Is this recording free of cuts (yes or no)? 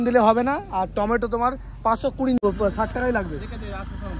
no